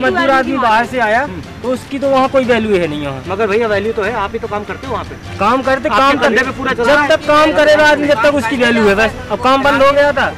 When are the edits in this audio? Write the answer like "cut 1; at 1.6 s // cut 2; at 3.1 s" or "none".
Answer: none